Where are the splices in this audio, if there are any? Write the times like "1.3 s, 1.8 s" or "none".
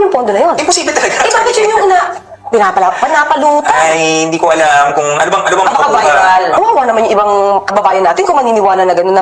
6.5 s

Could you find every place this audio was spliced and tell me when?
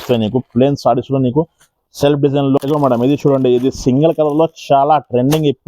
2.6 s

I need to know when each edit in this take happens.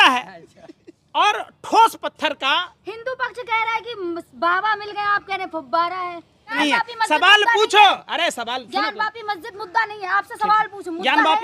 6.6 s

